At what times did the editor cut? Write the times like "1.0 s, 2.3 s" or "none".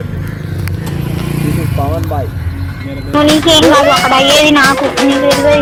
none